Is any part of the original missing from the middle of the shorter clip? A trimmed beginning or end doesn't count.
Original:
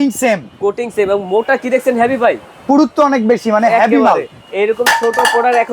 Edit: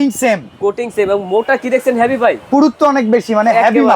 yes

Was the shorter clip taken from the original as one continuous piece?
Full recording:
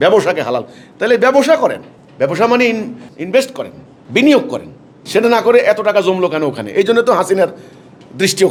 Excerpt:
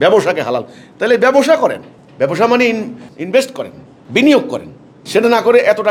yes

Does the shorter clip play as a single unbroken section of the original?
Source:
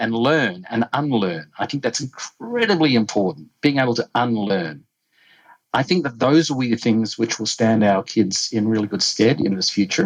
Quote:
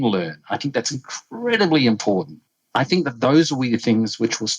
no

